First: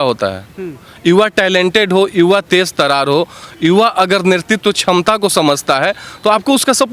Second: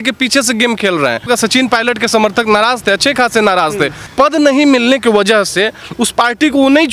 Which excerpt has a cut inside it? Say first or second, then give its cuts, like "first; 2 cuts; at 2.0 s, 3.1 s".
second; 2 cuts; at 1.3 s, 4.1 s